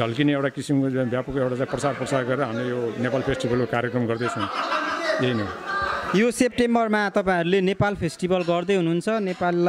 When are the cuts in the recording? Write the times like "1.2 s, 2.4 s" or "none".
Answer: none